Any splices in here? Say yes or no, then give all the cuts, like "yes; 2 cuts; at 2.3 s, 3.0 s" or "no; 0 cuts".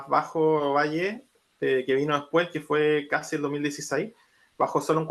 no; 0 cuts